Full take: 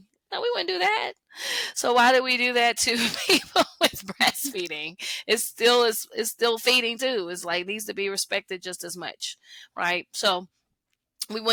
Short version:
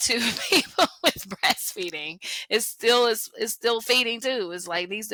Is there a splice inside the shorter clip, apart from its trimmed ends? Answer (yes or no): no